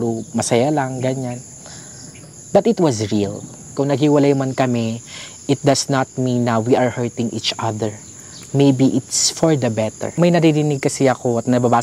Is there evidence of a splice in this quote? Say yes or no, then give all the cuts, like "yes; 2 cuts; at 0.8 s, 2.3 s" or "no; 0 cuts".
yes; 2 cuts; at 3.7 s, 10.1 s